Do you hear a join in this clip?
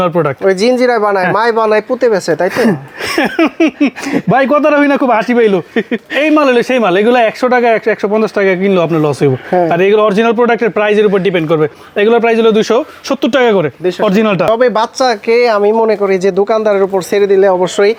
no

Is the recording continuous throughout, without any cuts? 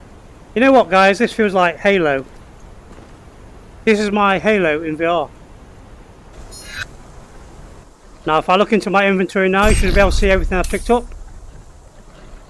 no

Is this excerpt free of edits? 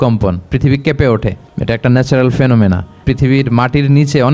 no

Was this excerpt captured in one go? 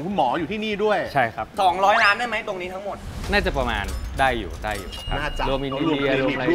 no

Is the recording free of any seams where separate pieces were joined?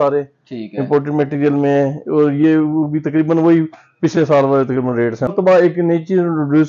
no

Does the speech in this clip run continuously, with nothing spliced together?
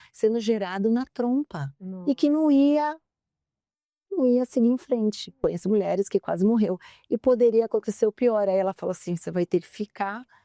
no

